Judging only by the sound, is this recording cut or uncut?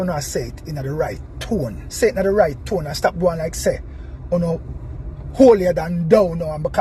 cut